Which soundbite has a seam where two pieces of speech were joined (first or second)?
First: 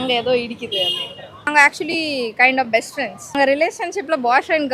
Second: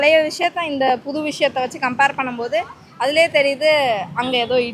first